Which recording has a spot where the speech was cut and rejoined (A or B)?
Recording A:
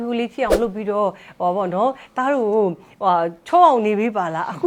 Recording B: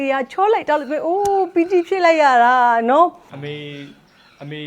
B